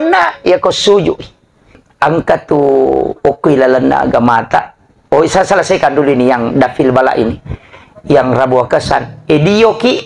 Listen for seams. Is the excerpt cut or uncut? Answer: cut